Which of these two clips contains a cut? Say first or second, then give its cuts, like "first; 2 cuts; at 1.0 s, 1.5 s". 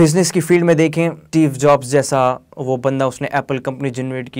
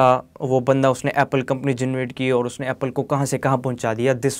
first; 1 cut; at 1.2 s